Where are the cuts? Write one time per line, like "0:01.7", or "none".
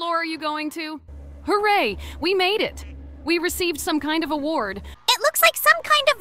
0:01.1
0:04.8